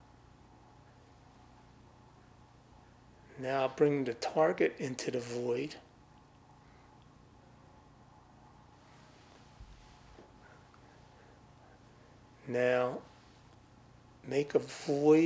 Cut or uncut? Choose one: uncut